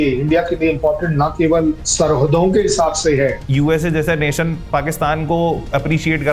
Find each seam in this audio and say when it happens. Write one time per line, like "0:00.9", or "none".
0:03.4